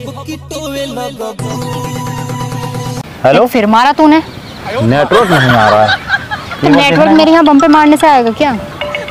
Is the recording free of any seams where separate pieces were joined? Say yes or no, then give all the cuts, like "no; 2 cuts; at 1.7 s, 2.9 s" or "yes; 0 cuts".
no; 1 cut; at 3.1 s